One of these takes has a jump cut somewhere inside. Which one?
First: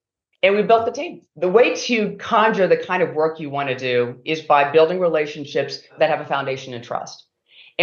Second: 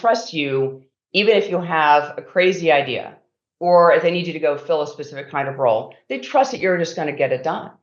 first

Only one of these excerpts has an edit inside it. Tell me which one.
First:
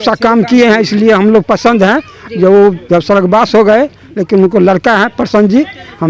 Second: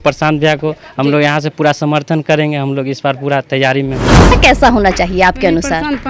second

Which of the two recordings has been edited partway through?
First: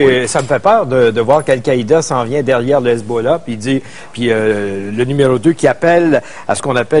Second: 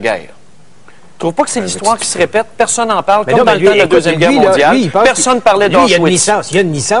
second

